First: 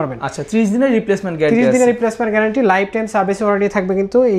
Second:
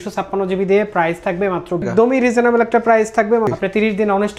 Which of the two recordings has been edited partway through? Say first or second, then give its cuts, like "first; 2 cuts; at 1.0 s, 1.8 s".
second; 2 cuts; at 1.8 s, 3.5 s